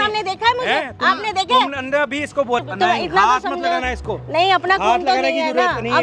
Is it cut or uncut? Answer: cut